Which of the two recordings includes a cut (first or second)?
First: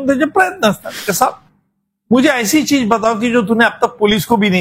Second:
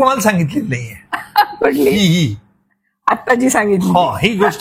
first